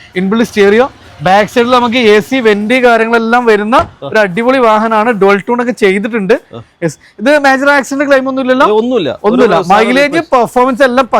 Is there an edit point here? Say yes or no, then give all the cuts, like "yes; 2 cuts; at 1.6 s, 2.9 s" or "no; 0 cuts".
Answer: no; 0 cuts